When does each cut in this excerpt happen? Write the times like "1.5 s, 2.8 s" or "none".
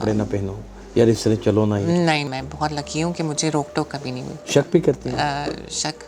2.3 s, 4.3 s